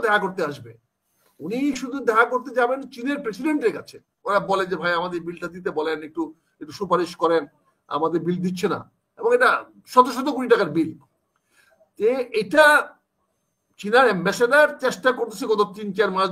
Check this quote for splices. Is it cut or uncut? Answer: cut